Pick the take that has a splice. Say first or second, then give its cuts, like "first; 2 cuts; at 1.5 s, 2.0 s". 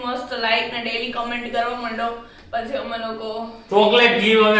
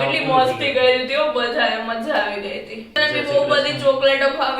second; 1 cut; at 3.0 s